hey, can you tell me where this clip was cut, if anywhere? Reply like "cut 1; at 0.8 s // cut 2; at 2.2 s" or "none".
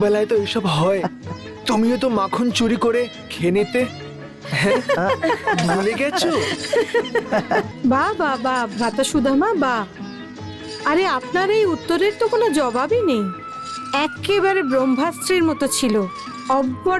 cut 1; at 1.0 s // cut 2; at 7.7 s